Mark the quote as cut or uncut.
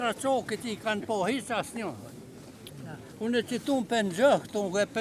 uncut